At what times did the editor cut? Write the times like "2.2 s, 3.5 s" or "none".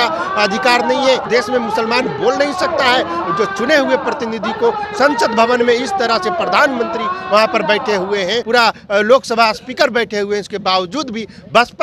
1.2 s, 8.4 s